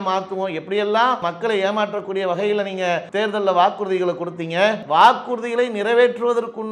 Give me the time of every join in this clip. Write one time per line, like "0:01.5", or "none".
0:01.2
0:03.1
0:04.8